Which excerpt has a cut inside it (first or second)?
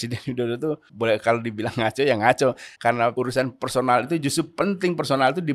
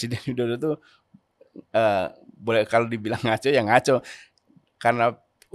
first